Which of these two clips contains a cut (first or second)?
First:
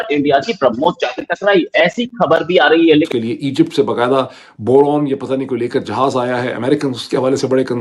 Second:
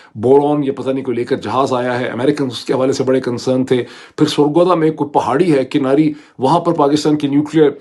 first